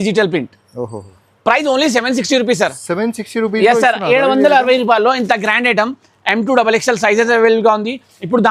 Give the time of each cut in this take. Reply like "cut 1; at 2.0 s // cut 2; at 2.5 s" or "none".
none